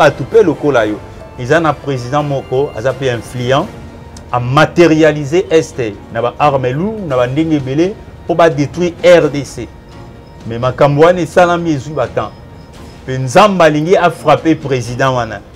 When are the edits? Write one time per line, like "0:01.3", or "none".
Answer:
0:01.1